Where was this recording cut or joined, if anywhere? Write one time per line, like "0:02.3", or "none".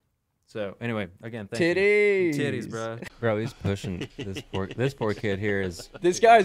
0:03.0

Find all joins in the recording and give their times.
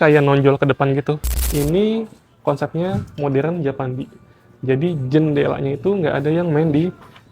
0:01.3

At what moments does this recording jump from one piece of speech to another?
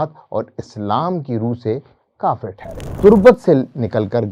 0:02.9

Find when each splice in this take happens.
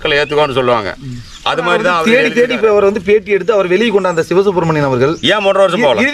0:02.0

